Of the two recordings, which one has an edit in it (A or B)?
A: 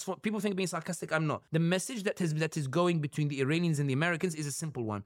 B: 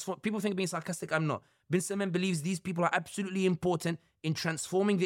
A